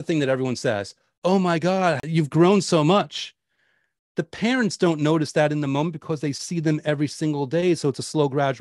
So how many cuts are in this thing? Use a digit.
1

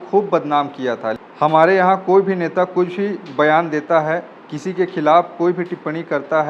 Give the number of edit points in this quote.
1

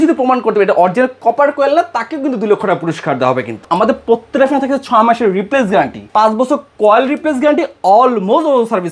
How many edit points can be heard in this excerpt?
2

